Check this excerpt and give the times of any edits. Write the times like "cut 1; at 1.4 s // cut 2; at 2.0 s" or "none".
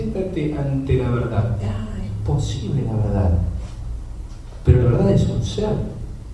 cut 1; at 3.5 s